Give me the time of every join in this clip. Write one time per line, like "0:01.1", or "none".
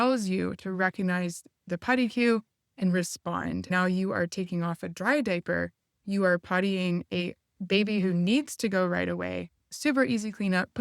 0:03.7
0:09.7

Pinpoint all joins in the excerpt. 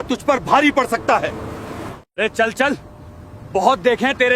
0:01.9

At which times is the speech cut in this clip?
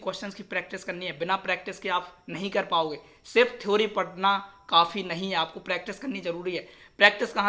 none

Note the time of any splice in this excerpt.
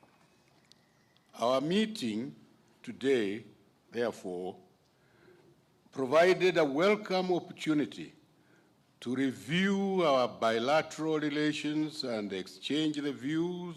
0:07.3

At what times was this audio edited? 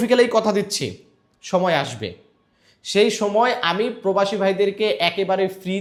none

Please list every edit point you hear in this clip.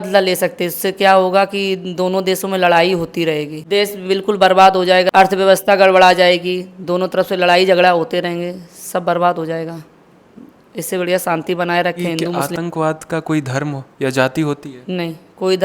0:03.6
0:05.1
0:12.4

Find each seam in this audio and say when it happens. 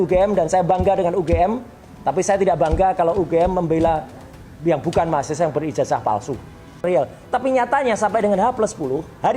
0:06.8

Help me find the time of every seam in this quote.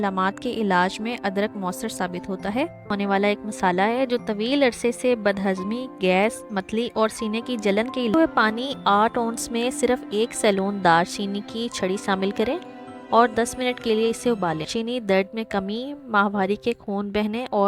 0:02.9
0:08.1
0:14.7

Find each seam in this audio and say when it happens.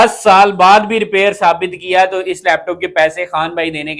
none

